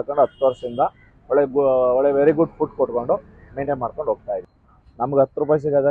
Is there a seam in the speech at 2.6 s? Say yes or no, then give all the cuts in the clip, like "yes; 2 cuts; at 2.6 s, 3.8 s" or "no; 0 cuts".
no; 1 cut; at 4.5 s